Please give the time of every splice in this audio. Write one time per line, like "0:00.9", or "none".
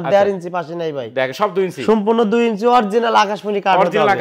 none